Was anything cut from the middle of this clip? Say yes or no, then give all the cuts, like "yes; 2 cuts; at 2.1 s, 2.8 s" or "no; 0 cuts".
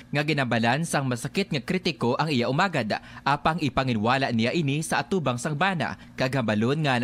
no; 0 cuts